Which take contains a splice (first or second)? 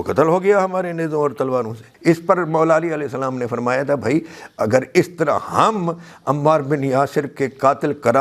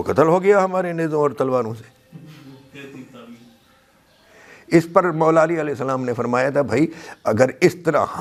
first